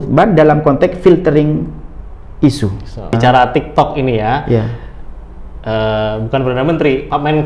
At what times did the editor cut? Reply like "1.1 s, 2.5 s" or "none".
3.2 s